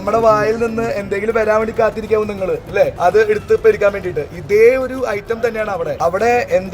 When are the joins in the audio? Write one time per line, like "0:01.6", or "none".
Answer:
0:02.9
0:05.9